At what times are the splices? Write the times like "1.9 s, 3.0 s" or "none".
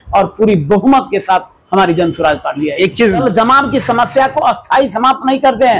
3.2 s